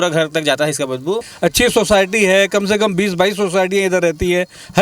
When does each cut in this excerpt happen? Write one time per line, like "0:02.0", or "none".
0:01.3